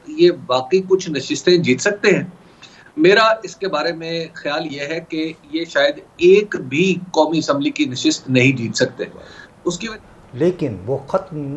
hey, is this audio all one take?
no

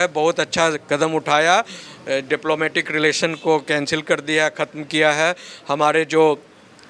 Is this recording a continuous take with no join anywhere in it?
yes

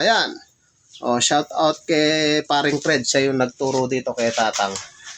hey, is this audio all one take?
yes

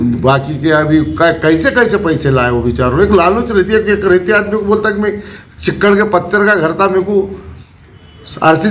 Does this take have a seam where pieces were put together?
no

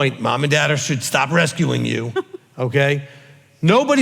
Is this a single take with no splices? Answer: yes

